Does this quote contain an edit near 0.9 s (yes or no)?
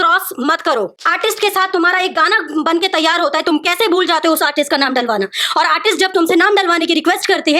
yes